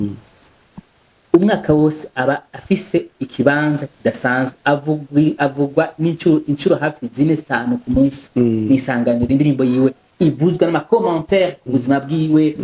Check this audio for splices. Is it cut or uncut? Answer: uncut